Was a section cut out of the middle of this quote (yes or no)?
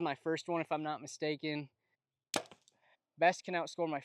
yes